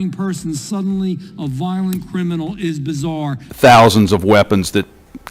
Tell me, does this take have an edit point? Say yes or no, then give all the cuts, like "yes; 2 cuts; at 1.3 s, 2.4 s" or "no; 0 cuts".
yes; 1 cut; at 3.5 s